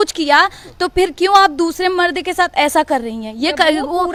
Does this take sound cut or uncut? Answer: uncut